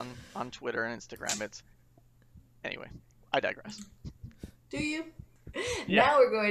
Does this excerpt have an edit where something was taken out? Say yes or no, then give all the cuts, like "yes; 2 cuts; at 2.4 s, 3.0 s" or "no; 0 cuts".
yes; 1 cut; at 5.1 s